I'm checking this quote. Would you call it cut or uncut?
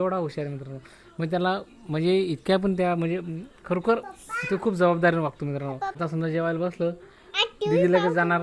cut